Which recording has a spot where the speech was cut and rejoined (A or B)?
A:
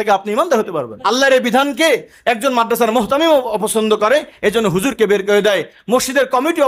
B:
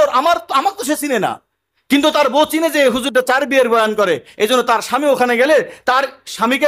A